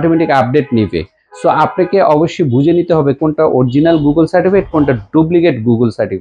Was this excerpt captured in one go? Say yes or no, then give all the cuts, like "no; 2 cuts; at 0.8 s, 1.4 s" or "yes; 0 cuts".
yes; 0 cuts